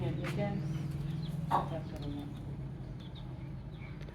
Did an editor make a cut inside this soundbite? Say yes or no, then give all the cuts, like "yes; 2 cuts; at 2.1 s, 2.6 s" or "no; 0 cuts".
no; 0 cuts